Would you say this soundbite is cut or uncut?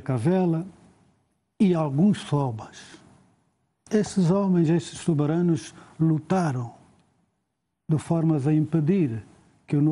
uncut